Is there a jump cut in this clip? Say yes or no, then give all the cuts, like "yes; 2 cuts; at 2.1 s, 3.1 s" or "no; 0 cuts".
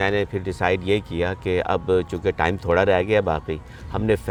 no; 0 cuts